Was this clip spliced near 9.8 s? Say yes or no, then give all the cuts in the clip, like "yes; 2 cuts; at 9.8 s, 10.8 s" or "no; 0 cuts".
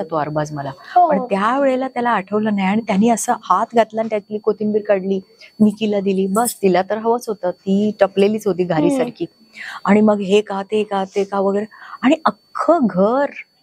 no; 0 cuts